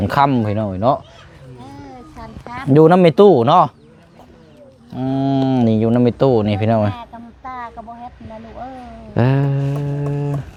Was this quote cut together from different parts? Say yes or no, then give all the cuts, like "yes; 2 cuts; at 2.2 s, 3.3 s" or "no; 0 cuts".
no; 0 cuts